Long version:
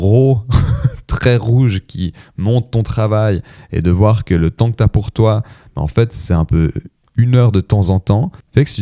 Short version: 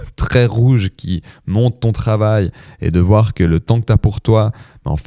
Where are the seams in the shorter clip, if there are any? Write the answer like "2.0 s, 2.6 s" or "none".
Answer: none